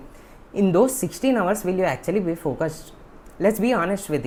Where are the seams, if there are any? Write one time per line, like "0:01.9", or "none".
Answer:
none